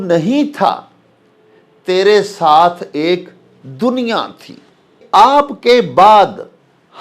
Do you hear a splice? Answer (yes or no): yes